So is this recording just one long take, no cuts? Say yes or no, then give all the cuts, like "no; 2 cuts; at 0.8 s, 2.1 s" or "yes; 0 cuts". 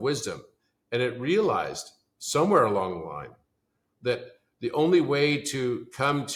yes; 0 cuts